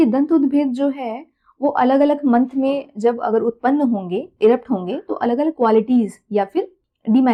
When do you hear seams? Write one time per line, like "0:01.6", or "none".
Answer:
none